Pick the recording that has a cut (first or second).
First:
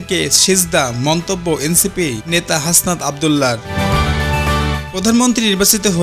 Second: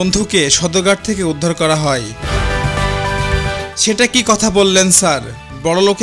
second